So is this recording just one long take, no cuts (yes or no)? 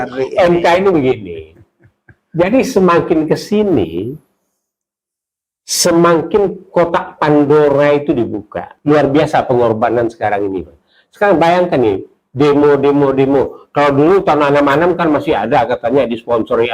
no